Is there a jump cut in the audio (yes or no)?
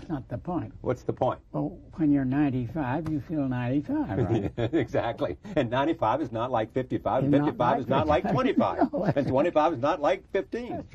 no